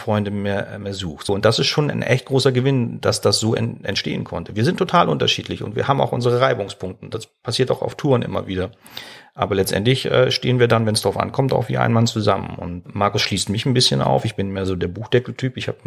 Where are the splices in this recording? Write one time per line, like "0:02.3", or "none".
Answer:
0:01.3
0:12.8